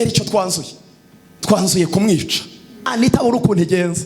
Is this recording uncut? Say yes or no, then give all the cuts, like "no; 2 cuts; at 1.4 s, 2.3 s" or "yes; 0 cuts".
no; 1 cut; at 2.9 s